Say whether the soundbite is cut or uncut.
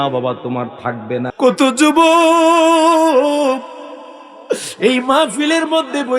cut